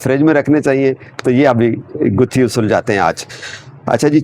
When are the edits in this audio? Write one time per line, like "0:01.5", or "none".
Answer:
none

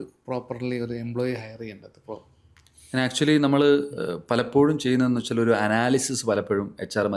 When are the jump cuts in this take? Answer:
none

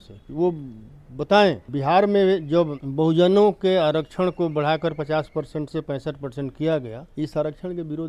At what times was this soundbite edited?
0:01.7
0:02.8
0:07.0

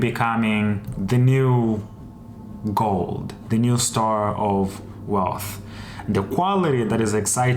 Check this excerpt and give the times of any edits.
0:00.9

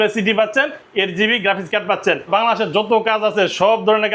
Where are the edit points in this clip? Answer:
0:02.3

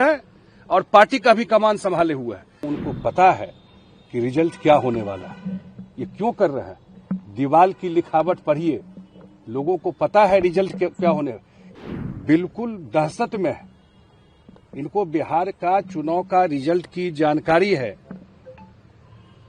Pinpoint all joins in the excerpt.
0:02.7
0:11.8

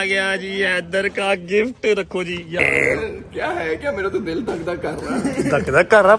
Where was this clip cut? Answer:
0:02.6

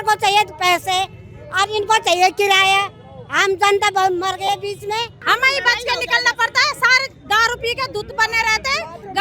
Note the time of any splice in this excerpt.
0:05.2

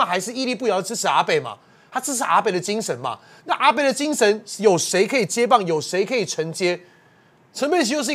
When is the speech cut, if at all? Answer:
none

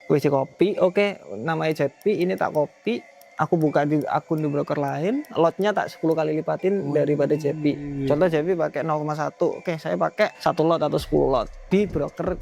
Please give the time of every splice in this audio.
0:10.4
0:11.6

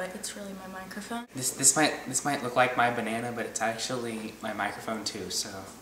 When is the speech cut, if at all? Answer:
0:01.3

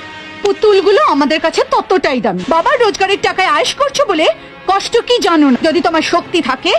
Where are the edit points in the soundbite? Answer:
0:02.4
0:05.6

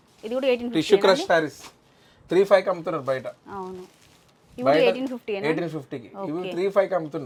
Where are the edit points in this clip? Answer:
none

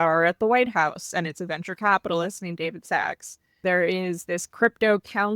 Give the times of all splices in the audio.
0:03.6

